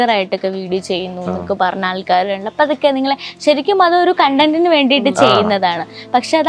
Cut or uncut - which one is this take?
uncut